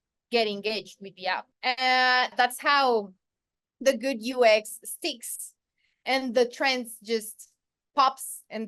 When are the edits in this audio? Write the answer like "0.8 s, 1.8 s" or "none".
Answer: 1.5 s, 2.3 s